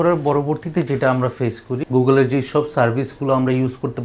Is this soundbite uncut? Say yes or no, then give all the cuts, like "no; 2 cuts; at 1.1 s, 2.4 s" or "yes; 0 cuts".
no; 1 cut; at 1.8 s